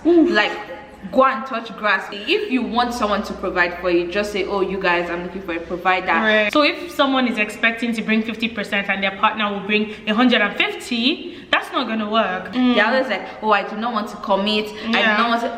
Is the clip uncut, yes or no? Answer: no